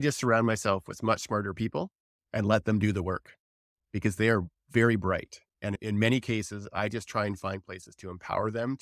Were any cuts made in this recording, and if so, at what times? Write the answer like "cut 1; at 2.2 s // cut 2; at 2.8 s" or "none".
cut 1; at 5.8 s

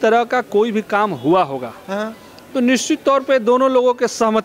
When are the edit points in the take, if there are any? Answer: none

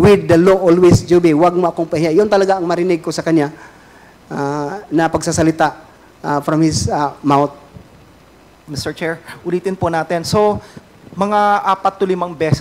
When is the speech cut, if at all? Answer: none

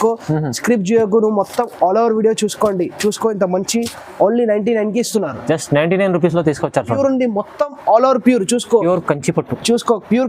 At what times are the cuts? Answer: cut 1; at 6.9 s

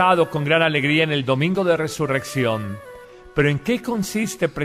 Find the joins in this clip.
cut 1; at 1.5 s

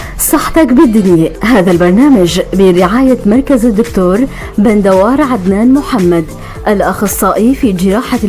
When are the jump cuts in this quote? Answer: cut 1; at 5.3 s

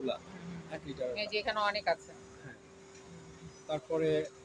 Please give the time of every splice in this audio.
none

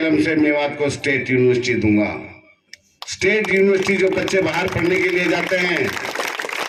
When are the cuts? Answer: none

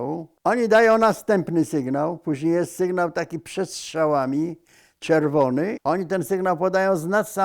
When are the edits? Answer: cut 1; at 5.8 s

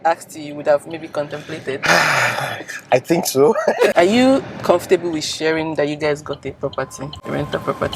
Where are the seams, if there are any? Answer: cut 1; at 3.9 s

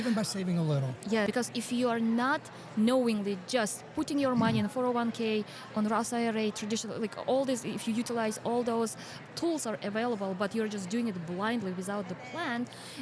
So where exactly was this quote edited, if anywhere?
cut 1; at 1.3 s

